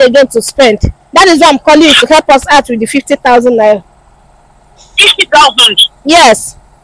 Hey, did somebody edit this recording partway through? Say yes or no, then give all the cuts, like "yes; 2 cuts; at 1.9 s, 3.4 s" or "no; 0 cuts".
no; 0 cuts